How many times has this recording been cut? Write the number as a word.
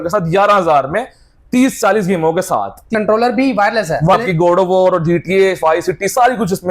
two